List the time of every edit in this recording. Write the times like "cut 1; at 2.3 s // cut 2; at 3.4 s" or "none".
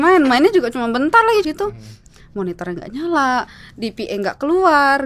cut 1; at 1.4 s